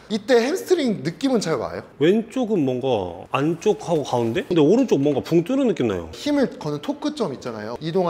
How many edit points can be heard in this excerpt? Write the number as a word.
two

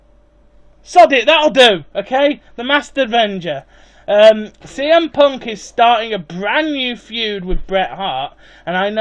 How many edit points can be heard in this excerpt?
one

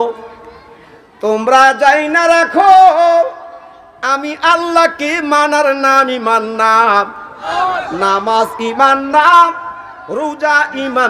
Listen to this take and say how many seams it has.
one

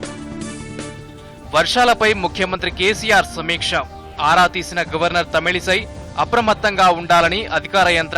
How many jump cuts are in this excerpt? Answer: one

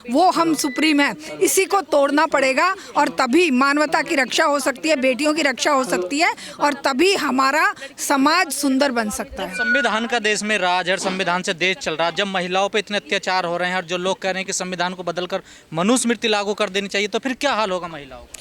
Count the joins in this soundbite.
zero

